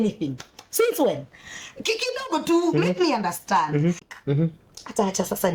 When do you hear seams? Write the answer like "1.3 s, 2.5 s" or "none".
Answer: 4.1 s